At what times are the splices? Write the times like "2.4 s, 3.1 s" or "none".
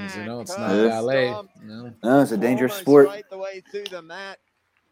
none